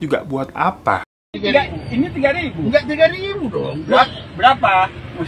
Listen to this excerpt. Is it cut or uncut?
cut